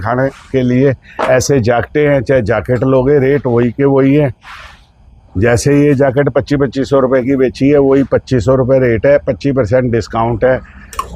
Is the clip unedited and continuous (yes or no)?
yes